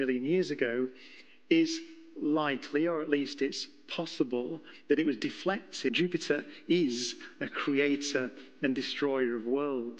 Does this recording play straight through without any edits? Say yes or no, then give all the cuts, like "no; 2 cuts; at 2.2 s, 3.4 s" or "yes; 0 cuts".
no; 1 cut; at 5.9 s